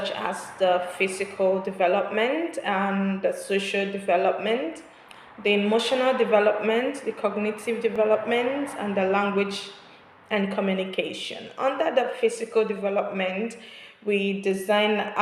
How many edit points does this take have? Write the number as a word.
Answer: one